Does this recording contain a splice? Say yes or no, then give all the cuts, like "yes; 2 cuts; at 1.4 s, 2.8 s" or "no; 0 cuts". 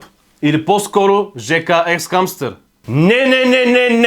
yes; 1 cut; at 2.8 s